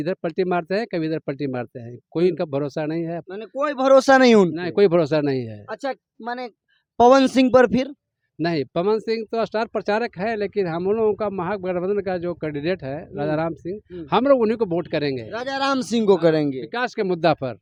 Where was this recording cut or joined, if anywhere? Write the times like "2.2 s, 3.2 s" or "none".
none